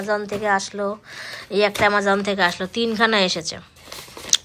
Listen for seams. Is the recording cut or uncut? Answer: uncut